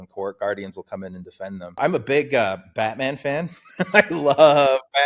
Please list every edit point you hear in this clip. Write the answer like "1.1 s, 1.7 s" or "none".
1.8 s